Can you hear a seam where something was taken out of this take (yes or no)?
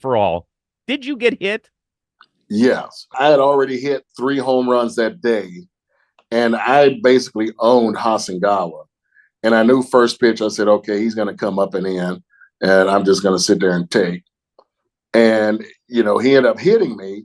yes